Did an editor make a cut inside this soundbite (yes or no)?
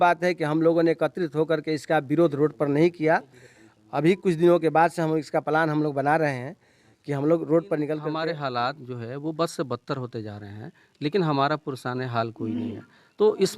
yes